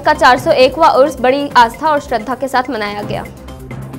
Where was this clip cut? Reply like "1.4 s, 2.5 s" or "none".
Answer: none